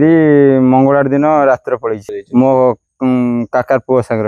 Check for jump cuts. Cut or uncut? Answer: cut